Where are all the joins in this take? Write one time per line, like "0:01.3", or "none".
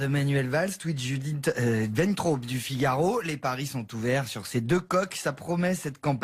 0:05.0